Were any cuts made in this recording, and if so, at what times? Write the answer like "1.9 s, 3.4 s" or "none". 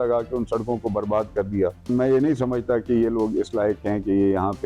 1.8 s